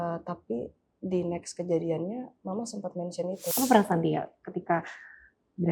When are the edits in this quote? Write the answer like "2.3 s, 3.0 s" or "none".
3.4 s